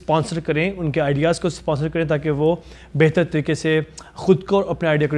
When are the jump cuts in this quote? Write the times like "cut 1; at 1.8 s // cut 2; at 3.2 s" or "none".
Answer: none